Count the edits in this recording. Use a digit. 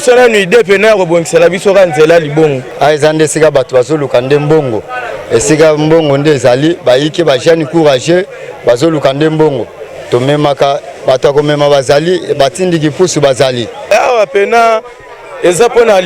2